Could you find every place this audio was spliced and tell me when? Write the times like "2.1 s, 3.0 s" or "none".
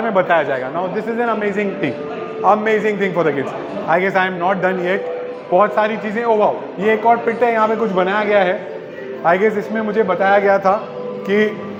none